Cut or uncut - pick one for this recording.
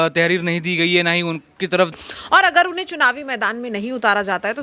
cut